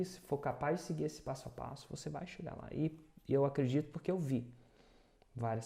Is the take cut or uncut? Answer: uncut